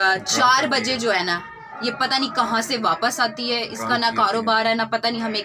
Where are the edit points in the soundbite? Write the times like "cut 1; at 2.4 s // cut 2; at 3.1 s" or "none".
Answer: none